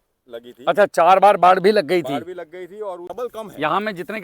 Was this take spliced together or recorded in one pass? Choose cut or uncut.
cut